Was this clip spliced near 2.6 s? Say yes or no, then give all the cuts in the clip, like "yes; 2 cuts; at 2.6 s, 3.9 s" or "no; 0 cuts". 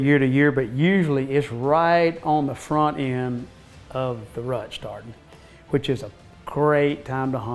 no; 0 cuts